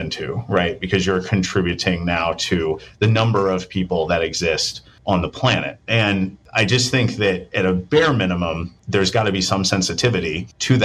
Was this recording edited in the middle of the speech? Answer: no; 0 cuts

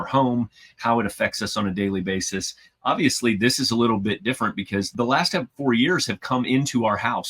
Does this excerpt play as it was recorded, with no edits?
no; 1 cut; at 4.9 s

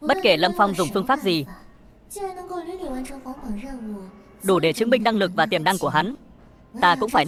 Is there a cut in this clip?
no; 0 cuts

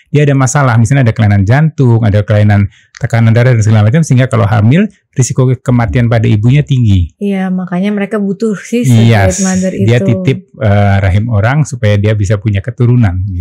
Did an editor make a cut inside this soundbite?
no; 0 cuts

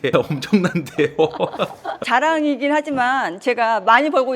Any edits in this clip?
yes; 1 cut; at 1.9 s

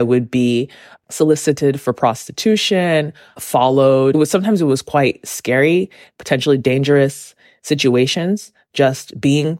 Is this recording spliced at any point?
yes; 1 cut; at 4.1 s

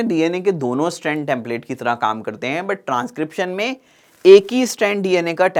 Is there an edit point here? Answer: no; 0 cuts

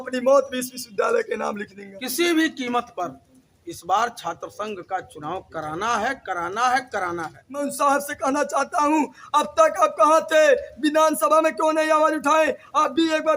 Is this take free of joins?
no; 2 cuts; at 1.8 s, 7.7 s

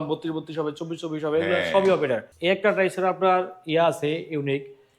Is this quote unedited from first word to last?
no; 1 cut; at 2.3 s

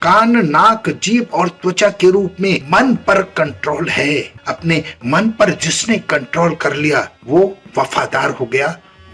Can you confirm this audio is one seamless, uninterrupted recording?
no; 1 cut; at 4.4 s

